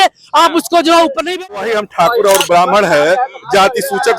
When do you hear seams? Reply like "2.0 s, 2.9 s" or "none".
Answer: 1.6 s